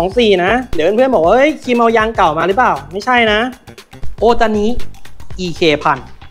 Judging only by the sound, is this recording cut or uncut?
uncut